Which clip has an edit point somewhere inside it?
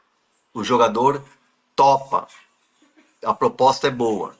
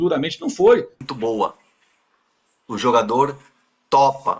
second; 1 cut; at 1.0 s

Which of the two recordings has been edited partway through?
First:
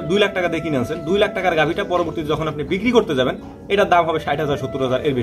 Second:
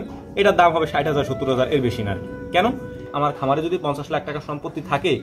second; 1 cut; at 3.1 s

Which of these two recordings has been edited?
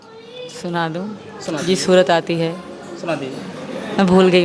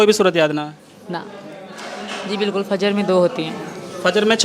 second; 1 cut; at 1.4 s

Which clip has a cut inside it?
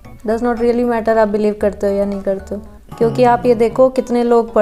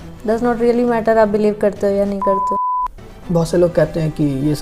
second; 1 cut; at 2.8 s

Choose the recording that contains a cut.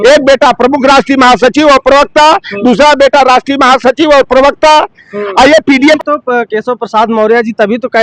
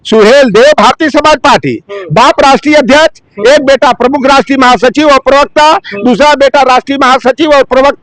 first; 1 cut; at 6.0 s

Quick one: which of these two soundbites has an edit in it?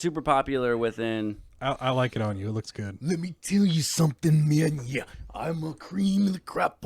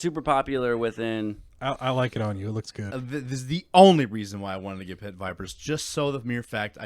second; 1 cut; at 3.0 s

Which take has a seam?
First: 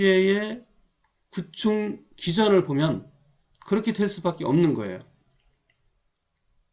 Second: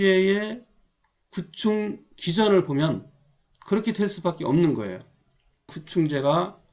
second; 1 cut; at 5.8 s

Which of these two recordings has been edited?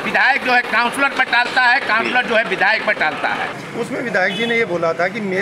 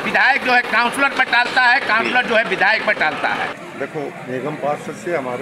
first; 1 cut; at 3.6 s

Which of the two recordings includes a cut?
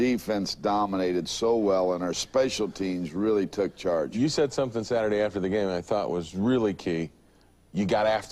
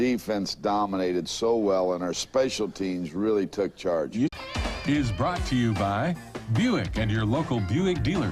first; 1 cut; at 4.3 s

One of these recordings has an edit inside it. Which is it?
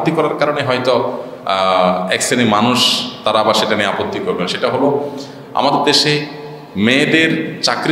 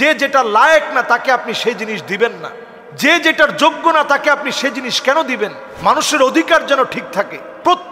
second; 1 cut; at 5.7 s

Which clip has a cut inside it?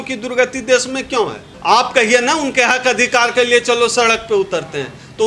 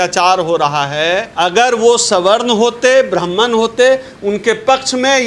second; 1 cut; at 1.3 s

